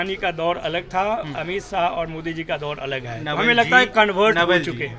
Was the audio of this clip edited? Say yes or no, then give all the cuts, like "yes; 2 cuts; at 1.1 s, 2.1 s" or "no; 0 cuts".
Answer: no; 0 cuts